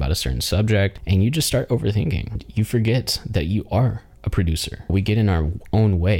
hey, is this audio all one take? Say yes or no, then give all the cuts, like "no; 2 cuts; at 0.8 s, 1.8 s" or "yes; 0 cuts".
no; 3 cuts; at 1.0 s, 2.4 s, 4.9 s